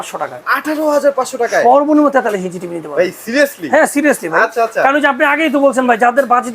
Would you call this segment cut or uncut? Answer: uncut